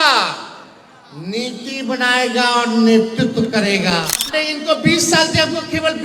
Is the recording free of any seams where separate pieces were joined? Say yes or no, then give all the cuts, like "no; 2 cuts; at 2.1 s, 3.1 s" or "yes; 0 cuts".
no; 1 cut; at 4.2 s